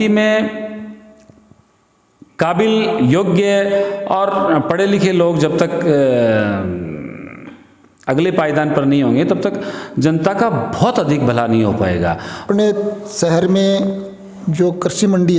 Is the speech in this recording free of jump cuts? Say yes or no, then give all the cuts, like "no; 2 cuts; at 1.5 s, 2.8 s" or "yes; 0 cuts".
no; 1 cut; at 12.5 s